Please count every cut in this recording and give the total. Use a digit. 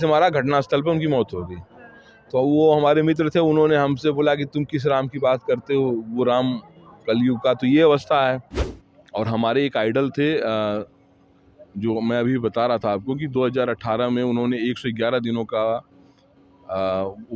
1